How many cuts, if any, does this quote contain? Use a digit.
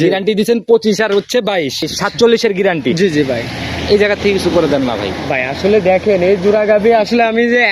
1